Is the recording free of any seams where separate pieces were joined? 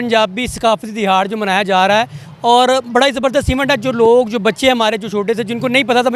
yes; 0 cuts

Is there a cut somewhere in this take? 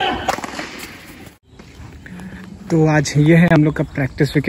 yes; 1 cut; at 1.7 s

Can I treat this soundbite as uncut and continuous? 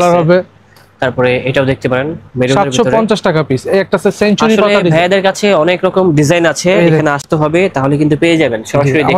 yes; 0 cuts

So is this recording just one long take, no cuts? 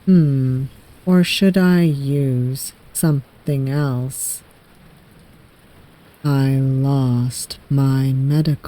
no; 1 cut; at 6.0 s

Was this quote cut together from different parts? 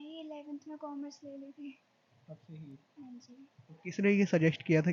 no; 0 cuts

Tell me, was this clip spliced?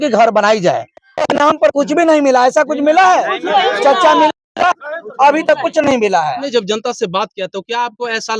yes; 2 cuts; at 1.0 s, 6.4 s

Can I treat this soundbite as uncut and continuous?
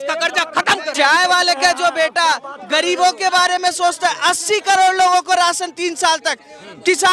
no; 1 cut; at 0.9 s

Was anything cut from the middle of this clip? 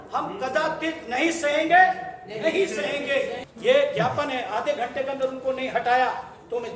yes; 1 cut; at 3.4 s

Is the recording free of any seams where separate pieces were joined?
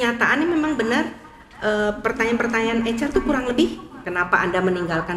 no; 1 cut; at 3.9 s

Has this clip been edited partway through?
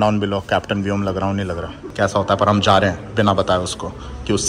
yes; 1 cut; at 1.8 s

